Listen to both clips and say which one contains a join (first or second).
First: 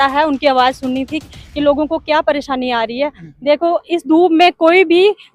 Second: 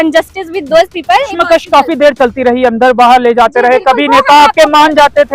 second